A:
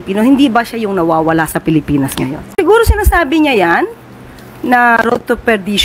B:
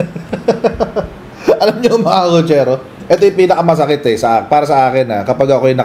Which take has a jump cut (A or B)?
A